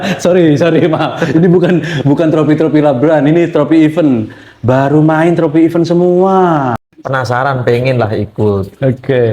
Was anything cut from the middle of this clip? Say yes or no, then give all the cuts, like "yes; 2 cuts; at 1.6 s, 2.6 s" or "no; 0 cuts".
yes; 1 cut; at 6.9 s